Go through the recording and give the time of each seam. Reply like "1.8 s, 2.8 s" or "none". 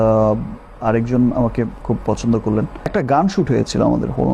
2.9 s